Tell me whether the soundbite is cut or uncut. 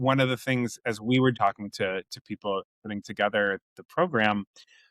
cut